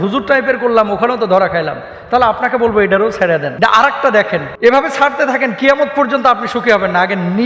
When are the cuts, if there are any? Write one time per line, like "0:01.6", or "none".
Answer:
0:03.5
0:04.5